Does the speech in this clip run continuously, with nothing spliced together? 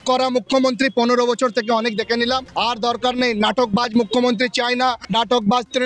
no; 2 cuts; at 2.5 s, 5.0 s

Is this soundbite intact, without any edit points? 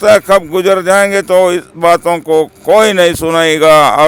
yes; 0 cuts

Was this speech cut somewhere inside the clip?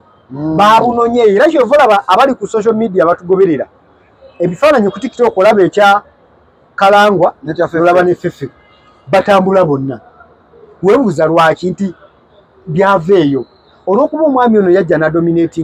no; 0 cuts

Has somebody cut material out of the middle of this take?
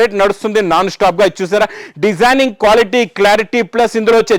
no; 0 cuts

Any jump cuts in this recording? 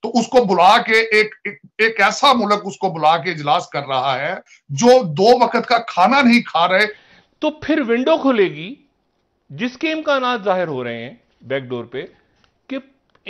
yes; 2 cuts; at 4.6 s, 7.0 s

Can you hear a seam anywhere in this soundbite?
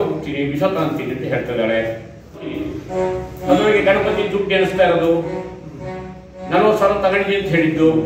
yes; 1 cut; at 2.5 s

